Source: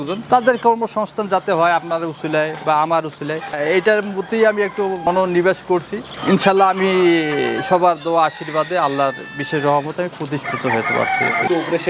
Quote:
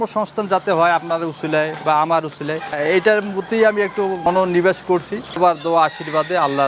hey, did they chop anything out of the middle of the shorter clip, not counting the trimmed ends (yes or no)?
yes